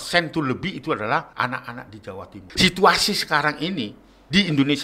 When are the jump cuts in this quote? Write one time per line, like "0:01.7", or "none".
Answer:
0:01.3
0:02.4